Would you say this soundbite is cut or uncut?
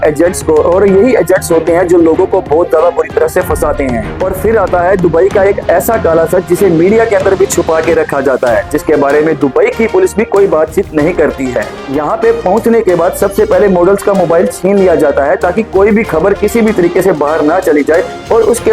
cut